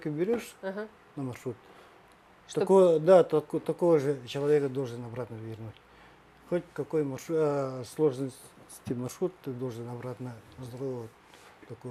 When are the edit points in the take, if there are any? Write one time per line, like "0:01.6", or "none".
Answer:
none